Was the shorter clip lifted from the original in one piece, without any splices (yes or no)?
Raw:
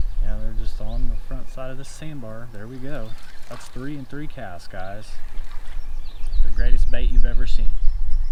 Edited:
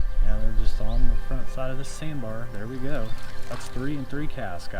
yes